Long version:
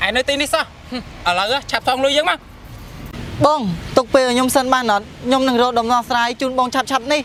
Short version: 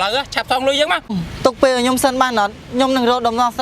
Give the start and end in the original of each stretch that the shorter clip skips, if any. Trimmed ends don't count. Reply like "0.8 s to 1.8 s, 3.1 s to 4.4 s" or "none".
2.5 s to 3.6 s